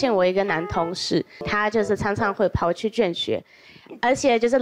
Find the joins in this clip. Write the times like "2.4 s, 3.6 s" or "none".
1.4 s